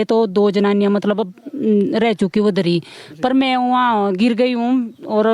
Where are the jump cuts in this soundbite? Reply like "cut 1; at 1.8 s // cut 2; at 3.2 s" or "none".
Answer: none